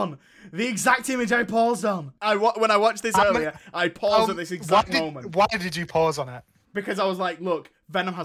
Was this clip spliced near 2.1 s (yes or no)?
yes